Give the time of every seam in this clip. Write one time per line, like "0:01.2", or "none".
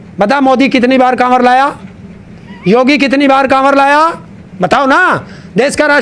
none